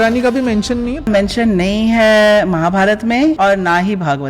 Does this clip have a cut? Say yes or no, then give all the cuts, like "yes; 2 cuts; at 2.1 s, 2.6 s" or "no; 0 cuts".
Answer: yes; 2 cuts; at 1.1 s, 3.4 s